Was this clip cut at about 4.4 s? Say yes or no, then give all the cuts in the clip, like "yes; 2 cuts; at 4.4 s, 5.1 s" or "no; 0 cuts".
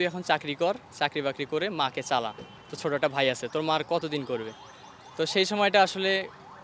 no; 0 cuts